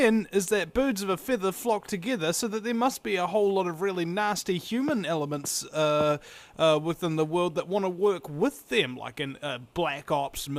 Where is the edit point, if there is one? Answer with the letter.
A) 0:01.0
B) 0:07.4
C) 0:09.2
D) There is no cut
A